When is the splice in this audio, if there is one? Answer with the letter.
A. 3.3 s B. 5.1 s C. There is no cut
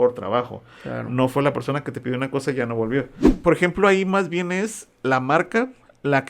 A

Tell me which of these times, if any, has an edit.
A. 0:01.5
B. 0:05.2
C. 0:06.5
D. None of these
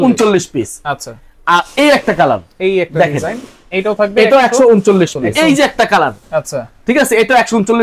B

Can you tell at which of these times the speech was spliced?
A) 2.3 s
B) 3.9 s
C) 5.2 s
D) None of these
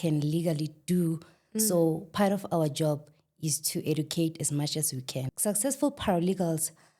C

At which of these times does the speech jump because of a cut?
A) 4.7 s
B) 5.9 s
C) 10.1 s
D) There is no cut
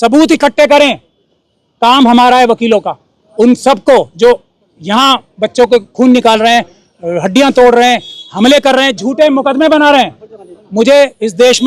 D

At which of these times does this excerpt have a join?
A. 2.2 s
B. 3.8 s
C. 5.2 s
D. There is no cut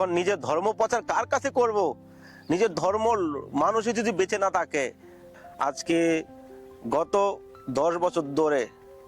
C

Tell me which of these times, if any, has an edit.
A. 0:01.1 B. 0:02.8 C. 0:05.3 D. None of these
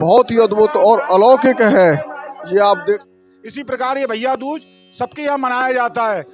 B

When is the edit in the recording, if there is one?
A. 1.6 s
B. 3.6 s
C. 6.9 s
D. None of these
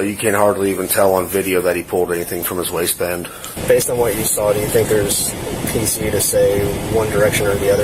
B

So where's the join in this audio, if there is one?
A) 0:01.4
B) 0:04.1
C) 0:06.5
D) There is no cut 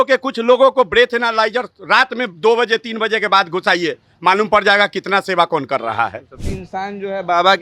C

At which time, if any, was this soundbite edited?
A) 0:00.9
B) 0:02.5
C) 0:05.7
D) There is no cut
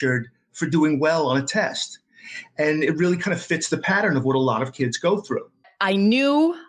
C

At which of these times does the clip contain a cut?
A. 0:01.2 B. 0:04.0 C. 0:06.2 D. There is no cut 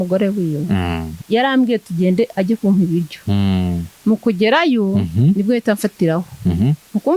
A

